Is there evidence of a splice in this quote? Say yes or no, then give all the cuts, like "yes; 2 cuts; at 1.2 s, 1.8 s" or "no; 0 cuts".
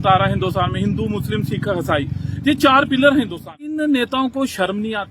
yes; 1 cut; at 3.6 s